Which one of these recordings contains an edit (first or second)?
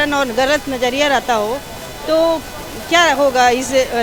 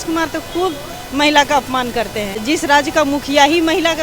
second